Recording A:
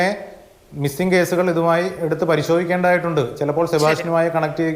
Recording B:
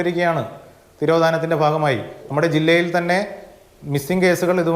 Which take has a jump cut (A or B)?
B